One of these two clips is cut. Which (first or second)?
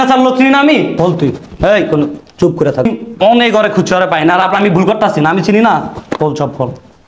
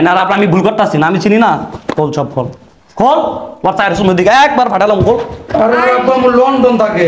first